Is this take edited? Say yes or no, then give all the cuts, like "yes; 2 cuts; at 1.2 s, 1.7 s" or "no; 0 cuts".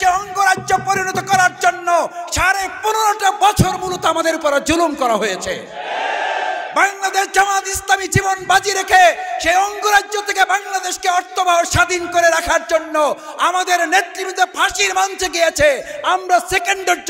no; 0 cuts